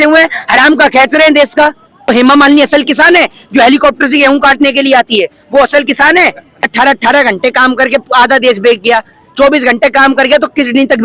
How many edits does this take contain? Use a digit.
2